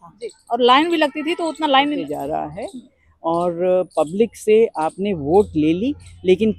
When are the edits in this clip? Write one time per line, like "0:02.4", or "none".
0:02.0